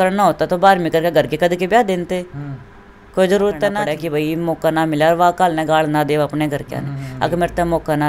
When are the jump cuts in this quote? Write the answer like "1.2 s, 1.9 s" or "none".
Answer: 3.8 s